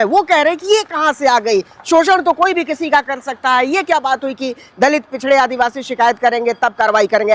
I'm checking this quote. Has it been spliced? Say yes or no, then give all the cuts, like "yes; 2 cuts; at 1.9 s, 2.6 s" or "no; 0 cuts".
no; 0 cuts